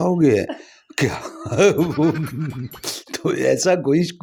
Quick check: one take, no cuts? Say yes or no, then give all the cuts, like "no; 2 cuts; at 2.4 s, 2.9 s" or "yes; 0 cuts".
yes; 0 cuts